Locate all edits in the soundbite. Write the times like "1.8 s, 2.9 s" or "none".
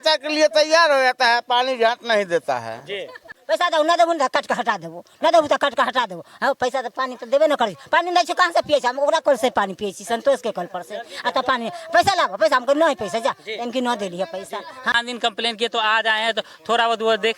3.2 s, 14.9 s